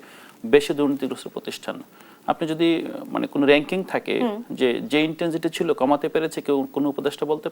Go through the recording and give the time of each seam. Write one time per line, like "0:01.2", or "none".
none